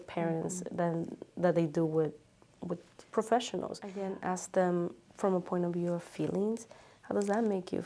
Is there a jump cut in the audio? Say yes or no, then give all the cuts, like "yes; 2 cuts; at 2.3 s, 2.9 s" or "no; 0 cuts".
yes; 1 cut; at 3.8 s